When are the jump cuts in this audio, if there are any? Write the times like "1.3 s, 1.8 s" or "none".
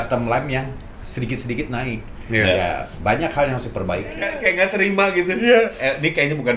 4.4 s